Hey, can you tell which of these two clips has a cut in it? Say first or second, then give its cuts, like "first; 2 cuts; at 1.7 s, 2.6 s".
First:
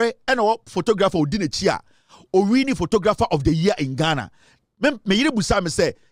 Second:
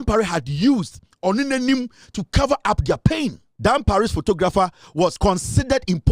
second; 2 cuts; at 3.4 s, 5.2 s